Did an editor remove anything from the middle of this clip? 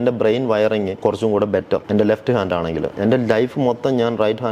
yes; 3 cuts; at 0.9 s, 1.8 s, 2.9 s

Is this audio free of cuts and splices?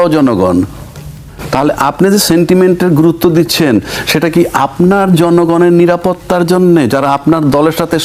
yes; 0 cuts

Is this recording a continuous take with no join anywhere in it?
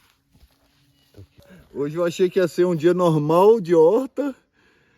no; 1 cut; at 1.3 s

